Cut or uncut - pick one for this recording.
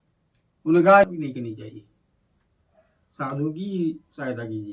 cut